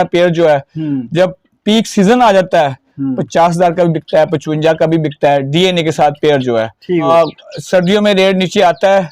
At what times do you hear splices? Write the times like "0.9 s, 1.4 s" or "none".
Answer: 7.1 s